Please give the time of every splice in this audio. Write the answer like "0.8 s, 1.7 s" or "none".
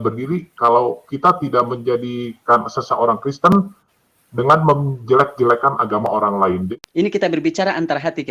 6.7 s